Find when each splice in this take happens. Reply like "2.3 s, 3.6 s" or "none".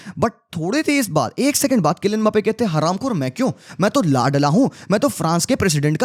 none